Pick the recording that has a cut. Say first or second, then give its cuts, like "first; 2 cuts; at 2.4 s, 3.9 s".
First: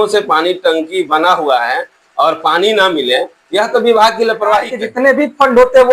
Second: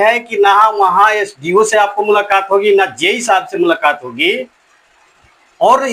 first; 1 cut; at 4.8 s